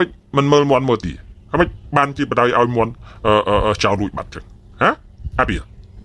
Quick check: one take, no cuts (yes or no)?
yes